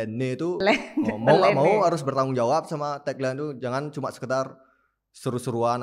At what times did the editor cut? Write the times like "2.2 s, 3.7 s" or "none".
none